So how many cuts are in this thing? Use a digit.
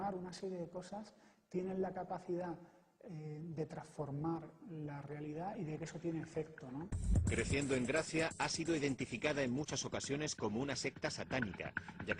1